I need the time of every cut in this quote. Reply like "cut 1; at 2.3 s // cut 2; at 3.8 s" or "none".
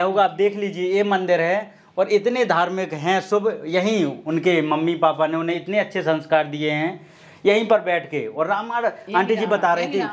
none